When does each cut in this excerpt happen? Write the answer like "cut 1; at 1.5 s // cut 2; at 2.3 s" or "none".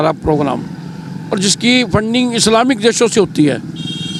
none